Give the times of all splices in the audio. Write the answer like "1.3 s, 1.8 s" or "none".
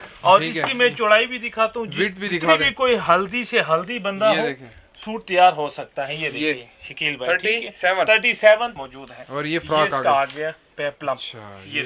8.8 s